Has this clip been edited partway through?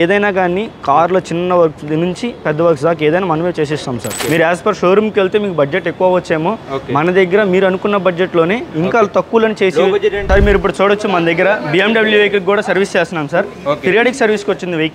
yes; 2 cuts; at 4.2 s, 10.2 s

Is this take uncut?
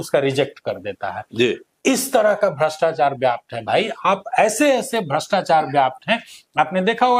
yes; 0 cuts

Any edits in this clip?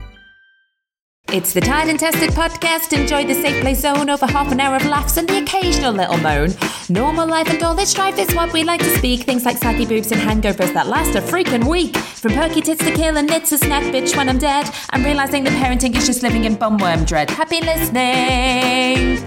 yes; 1 cut; at 1.2 s

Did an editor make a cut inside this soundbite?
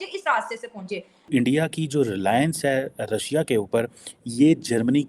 yes; 1 cut; at 1.3 s

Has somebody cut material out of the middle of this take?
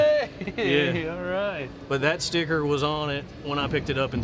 no; 0 cuts

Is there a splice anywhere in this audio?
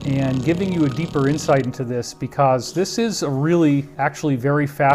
yes; 1 cut; at 3.9 s

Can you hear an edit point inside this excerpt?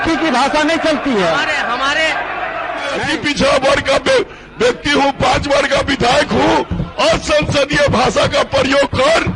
yes; 1 cut; at 3.1 s

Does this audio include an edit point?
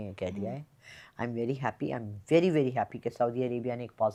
no; 0 cuts

